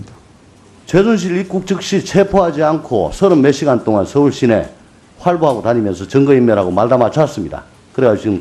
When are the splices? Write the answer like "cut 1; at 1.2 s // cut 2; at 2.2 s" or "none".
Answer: cut 1; at 3.9 s